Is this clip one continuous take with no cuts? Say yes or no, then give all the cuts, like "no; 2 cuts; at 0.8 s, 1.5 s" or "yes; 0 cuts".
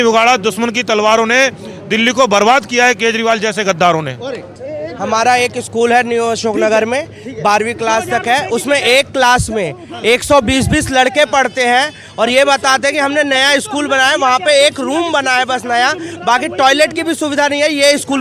no; 1 cut; at 4.5 s